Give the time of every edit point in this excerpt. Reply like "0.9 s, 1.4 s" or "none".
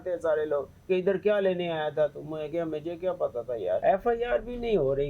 3.8 s